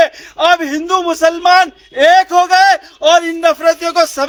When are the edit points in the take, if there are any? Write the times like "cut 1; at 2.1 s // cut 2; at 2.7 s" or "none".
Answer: none